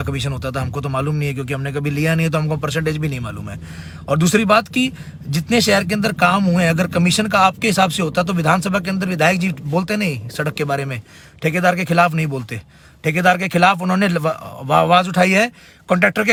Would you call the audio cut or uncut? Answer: uncut